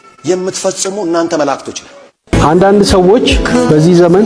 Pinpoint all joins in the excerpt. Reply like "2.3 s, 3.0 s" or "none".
2.3 s